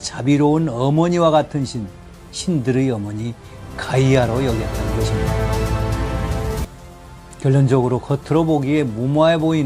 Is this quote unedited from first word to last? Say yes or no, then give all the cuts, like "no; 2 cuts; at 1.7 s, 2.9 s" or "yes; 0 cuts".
no; 1 cut; at 6.6 s